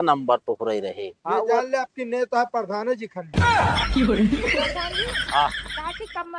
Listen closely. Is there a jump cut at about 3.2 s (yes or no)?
yes